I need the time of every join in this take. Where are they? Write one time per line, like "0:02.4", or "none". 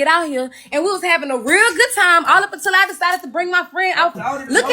none